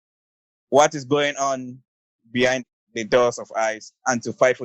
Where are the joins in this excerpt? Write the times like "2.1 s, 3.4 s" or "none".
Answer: 2.8 s